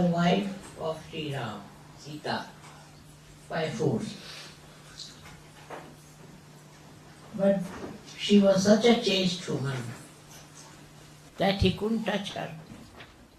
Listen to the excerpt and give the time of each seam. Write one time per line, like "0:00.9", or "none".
none

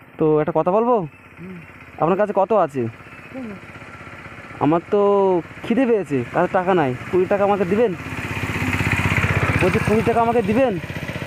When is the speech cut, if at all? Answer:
none

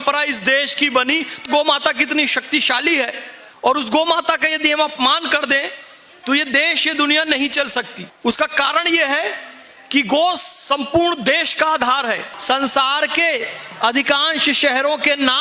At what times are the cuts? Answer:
0:01.4
0:08.0
0:12.3

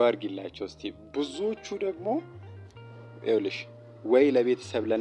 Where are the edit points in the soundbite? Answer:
none

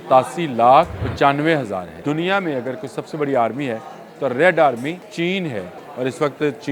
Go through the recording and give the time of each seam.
0:01.0
0:01.9
0:05.1
0:05.8

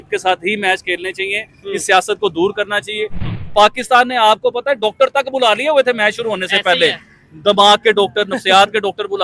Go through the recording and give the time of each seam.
0:03.2

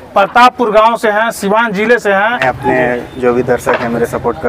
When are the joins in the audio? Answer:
0:02.4

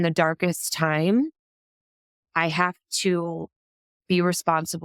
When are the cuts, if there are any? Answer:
none

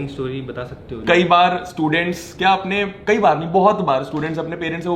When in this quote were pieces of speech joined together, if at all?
0:01.0

